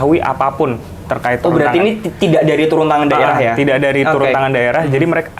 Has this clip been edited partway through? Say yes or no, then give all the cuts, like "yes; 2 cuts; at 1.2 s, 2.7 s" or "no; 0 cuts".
no; 0 cuts